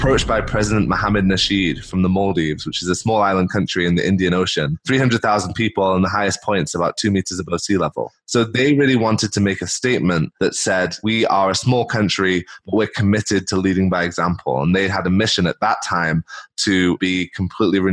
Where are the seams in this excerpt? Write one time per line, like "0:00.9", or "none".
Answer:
0:04.8
0:10.9